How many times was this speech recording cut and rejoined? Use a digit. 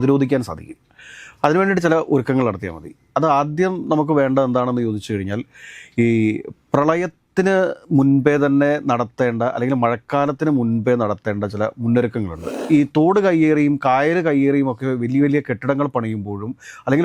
1